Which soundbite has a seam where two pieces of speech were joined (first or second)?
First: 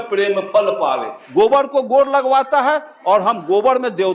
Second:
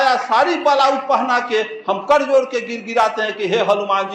first